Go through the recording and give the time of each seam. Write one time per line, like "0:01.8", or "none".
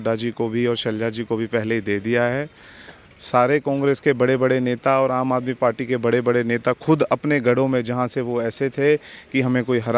none